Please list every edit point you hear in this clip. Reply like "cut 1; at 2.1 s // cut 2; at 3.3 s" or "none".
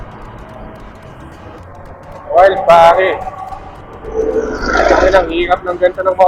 cut 1; at 1.6 s

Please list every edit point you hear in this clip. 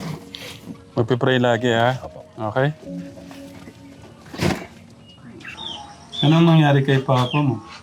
cut 1; at 5.6 s

